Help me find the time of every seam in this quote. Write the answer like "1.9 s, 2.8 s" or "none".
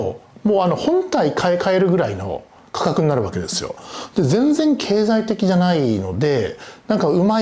none